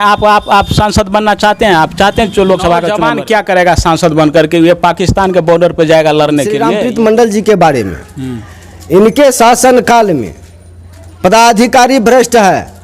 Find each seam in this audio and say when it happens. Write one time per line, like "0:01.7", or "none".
0:03.0
0:06.7